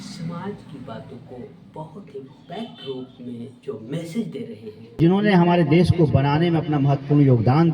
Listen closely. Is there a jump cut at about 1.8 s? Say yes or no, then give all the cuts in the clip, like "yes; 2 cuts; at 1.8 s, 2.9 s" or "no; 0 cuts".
no; 1 cut; at 5.0 s